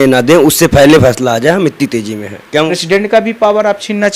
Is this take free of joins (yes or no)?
no